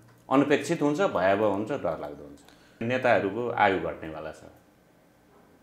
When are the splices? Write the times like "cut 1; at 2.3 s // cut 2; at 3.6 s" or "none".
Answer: cut 1; at 2.8 s